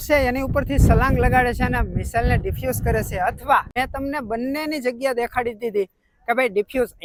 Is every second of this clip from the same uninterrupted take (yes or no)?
yes